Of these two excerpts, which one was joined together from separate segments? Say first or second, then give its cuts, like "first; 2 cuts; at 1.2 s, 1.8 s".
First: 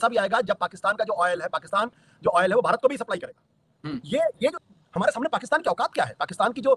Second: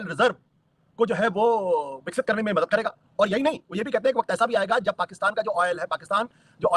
first; 1 cut; at 4.6 s